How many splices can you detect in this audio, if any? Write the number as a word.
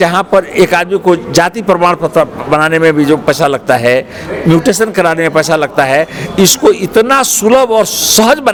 zero